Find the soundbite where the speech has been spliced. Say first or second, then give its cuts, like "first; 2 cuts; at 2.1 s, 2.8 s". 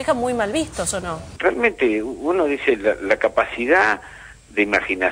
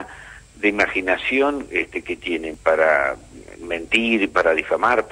first; 1 cut; at 1.3 s